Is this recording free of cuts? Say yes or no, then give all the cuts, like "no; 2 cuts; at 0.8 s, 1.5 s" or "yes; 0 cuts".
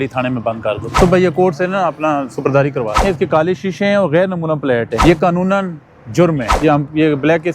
no; 4 cuts; at 0.9 s, 3.0 s, 4.9 s, 6.5 s